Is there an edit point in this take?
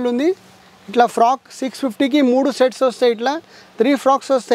no; 0 cuts

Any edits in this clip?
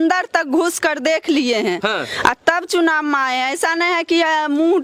no; 0 cuts

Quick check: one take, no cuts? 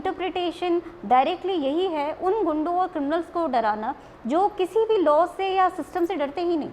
yes; 0 cuts

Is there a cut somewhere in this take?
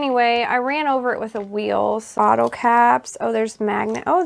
yes; 1 cut; at 2.2 s

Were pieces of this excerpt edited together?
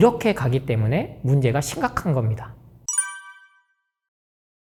no; 0 cuts

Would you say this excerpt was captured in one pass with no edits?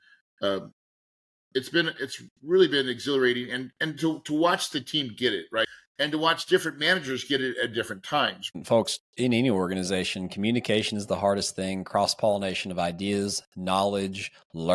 no; 2 cuts; at 5.6 s, 8.5 s

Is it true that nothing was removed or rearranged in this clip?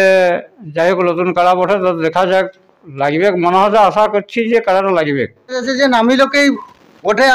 no; 1 cut; at 5.6 s

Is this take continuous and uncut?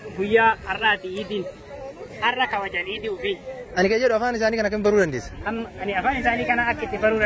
no; 1 cut; at 3.6 s

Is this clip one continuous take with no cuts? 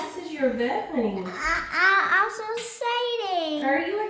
yes; 0 cuts

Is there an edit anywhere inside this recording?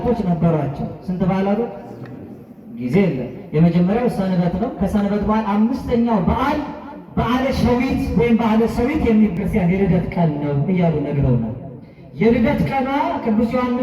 yes; 1 cut; at 9.4 s

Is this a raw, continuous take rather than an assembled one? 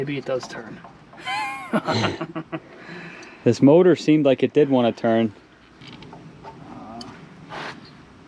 no; 1 cut; at 5.8 s

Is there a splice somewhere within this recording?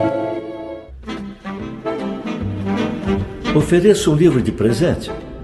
yes; 1 cut; at 0.9 s

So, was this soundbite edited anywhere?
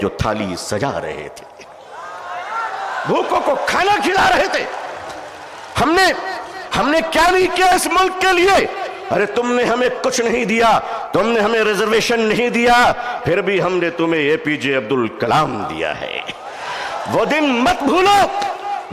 no; 0 cuts

